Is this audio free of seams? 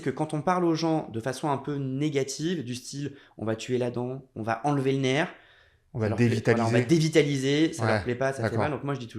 yes; 0 cuts

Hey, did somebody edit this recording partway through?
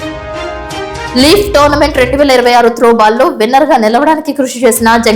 yes; 1 cut; at 1.1 s

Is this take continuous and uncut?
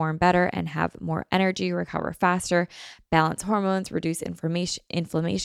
yes; 0 cuts

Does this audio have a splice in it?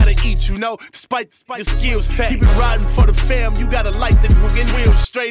no; 0 cuts

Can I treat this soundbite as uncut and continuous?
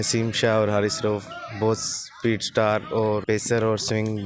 no; 1 cut; at 3.2 s

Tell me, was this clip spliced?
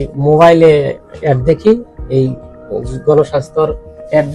no; 0 cuts

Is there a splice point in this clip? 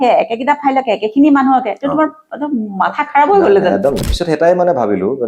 yes; 1 cut; at 4.1 s

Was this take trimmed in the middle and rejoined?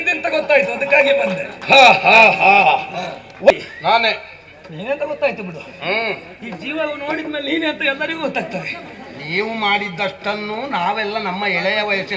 yes; 1 cut; at 3.5 s

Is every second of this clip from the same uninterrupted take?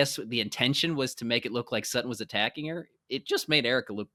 yes; 0 cuts

